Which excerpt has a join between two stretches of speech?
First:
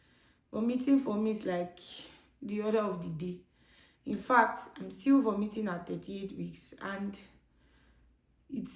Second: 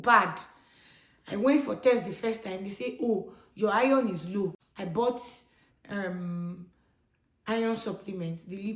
second; 1 cut; at 4.7 s

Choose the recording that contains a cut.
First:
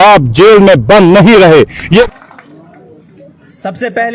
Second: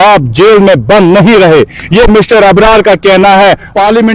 first; 1 cut; at 2.1 s

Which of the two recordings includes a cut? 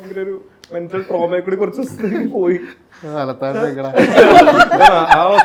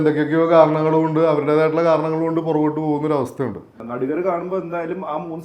second; 1 cut; at 3.8 s

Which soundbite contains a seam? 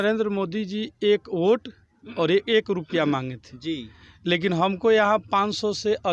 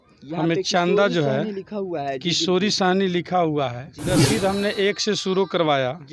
second; 1 cut; at 4.1 s

